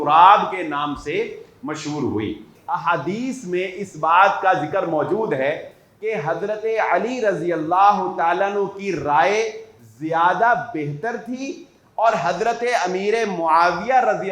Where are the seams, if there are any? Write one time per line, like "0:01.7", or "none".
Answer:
0:02.5